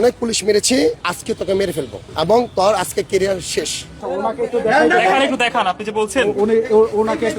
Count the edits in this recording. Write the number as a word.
three